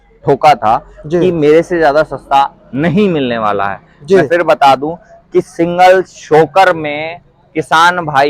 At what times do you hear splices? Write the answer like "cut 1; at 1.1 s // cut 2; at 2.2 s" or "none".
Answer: none